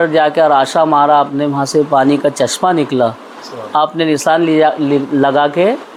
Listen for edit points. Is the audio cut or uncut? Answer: uncut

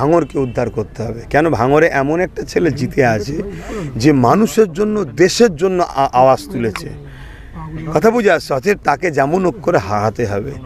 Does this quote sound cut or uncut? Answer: uncut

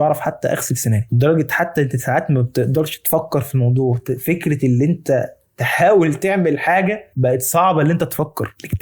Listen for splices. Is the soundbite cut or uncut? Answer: cut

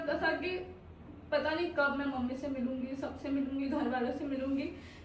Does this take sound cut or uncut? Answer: uncut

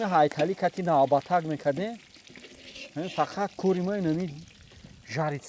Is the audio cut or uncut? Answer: uncut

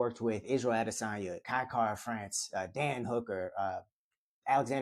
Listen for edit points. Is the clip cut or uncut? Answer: cut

